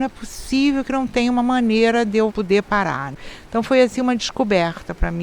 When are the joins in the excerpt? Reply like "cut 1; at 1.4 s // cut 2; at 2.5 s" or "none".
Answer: cut 1; at 3.1 s